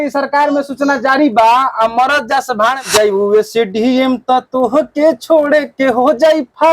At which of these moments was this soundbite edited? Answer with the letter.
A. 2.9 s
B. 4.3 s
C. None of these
A